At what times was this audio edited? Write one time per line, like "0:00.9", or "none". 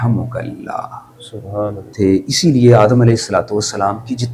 0:01.9